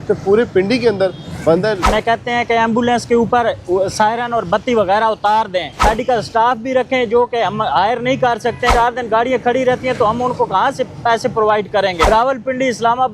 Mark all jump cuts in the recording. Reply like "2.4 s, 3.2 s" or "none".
1.9 s, 5.8 s, 8.7 s, 12.0 s